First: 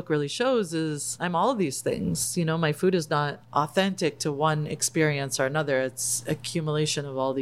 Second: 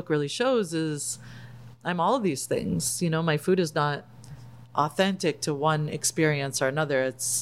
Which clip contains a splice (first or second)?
first